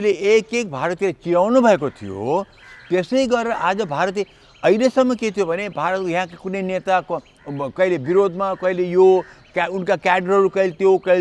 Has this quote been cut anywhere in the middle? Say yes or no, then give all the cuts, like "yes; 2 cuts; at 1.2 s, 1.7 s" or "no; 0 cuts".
no; 0 cuts